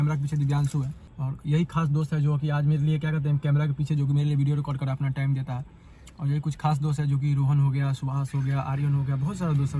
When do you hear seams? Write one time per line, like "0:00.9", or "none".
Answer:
0:01.0